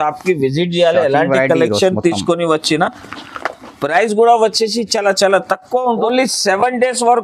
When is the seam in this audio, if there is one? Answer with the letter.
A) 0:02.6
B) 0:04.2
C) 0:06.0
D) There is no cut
C